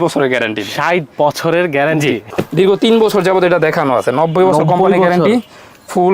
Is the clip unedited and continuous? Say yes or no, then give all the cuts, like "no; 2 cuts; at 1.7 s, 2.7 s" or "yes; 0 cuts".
no; 1 cut; at 2.3 s